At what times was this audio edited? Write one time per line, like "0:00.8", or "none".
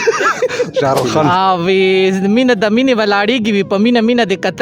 0:01.3